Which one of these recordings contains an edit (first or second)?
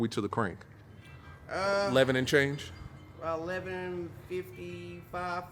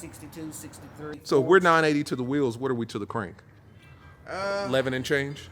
second